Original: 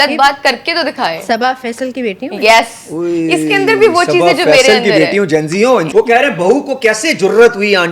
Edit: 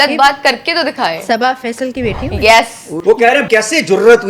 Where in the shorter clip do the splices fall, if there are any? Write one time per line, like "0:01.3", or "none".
0:03.3